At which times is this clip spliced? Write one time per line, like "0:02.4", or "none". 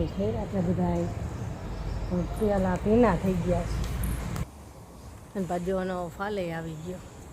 0:04.4